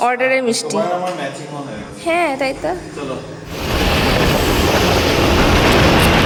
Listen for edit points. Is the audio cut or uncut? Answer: uncut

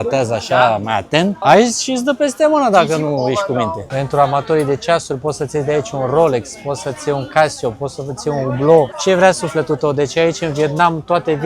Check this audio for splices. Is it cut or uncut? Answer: cut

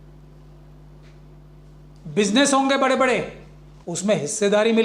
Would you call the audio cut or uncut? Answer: uncut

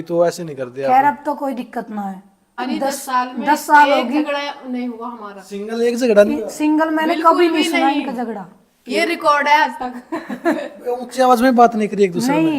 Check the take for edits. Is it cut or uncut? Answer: cut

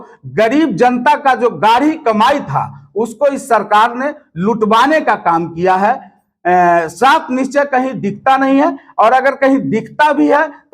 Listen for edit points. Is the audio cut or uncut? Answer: uncut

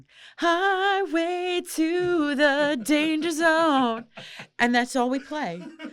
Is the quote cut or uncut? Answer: uncut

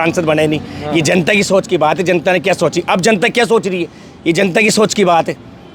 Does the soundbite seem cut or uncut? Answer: uncut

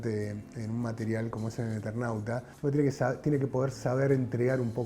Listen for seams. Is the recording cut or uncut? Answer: cut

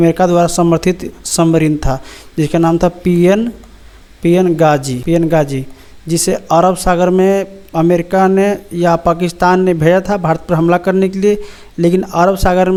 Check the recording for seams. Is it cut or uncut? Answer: uncut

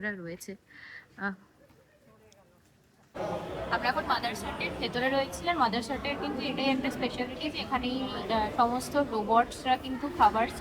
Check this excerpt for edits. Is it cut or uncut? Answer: cut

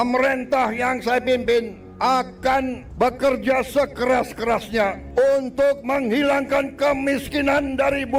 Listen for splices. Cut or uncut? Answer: cut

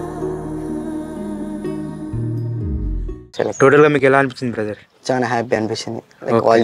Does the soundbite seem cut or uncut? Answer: cut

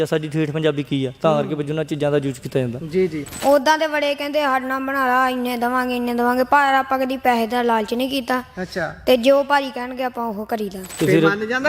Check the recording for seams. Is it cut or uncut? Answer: cut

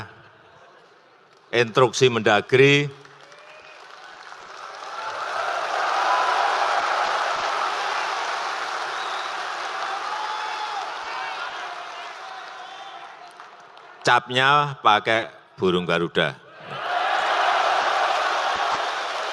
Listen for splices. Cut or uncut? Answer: uncut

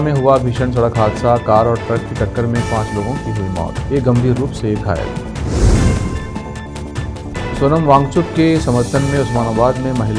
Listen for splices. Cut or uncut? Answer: uncut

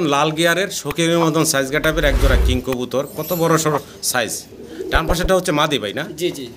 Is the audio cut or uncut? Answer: uncut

